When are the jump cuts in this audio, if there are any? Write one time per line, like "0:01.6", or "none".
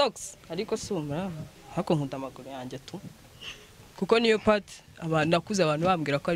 none